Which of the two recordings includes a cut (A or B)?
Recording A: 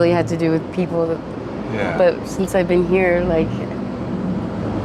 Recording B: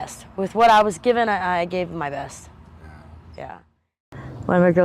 B